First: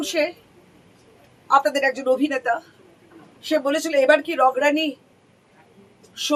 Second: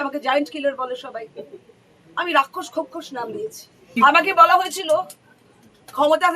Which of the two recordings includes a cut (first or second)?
second